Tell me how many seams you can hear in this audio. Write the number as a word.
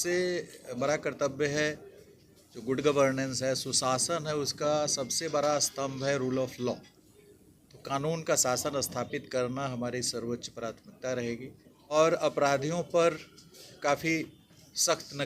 one